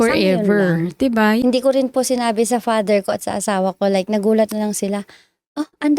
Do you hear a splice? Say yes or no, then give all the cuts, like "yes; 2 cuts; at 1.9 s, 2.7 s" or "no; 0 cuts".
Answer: yes; 1 cut; at 1.4 s